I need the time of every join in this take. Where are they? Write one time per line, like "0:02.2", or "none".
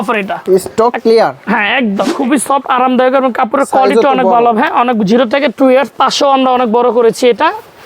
0:02.1

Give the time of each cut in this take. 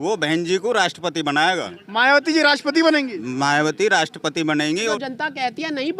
0:01.8
0:05.0

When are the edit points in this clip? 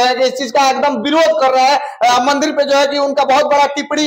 none

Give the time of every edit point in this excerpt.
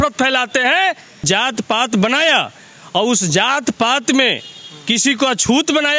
0:01.2

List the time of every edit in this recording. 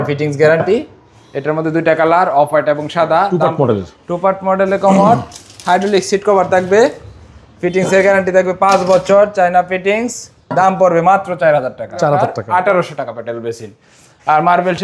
0:03.3
0:12.4

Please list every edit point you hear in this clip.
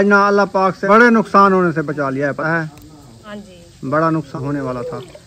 0:00.8
0:02.5
0:04.3

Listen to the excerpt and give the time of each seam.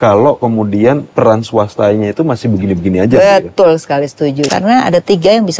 0:01.1
0:04.5

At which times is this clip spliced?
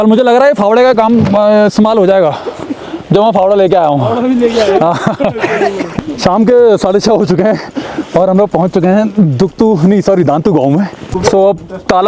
0:05.9
0:11.0

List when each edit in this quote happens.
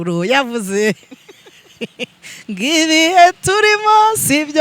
none

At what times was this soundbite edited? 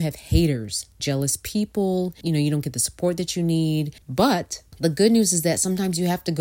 0:01.0
0:02.2
0:04.0

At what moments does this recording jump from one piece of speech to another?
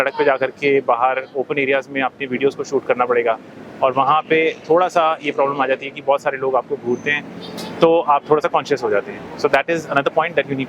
none

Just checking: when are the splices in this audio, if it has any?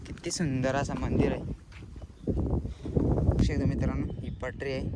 0:03.4

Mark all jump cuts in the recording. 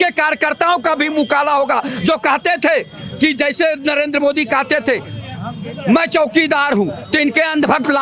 none

